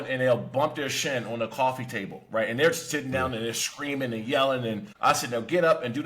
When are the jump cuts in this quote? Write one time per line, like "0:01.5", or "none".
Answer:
0:04.9